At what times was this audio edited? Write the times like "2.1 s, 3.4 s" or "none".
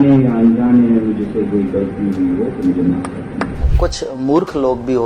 3.6 s